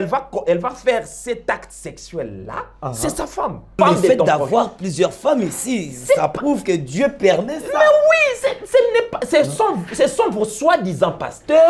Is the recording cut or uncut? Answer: cut